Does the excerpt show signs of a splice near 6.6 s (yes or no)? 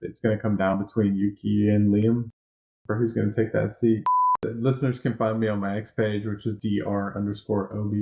yes